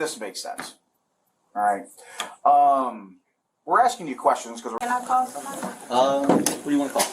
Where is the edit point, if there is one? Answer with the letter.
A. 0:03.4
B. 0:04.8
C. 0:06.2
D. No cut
B